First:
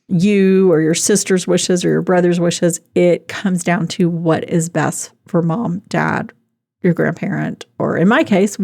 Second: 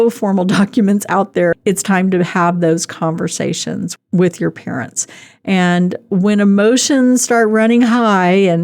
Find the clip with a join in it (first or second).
second